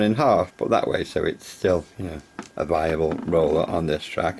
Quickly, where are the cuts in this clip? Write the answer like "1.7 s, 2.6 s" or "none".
none